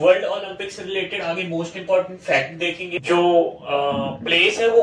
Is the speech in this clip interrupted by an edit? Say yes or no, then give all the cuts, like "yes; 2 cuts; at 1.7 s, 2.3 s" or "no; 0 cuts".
yes; 1 cut; at 2.9 s